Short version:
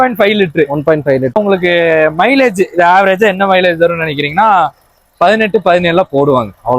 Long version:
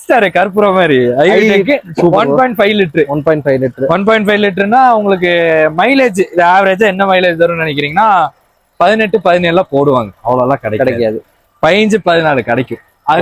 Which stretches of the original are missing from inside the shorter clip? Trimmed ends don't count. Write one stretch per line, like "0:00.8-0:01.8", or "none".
0:03.8-0:05.0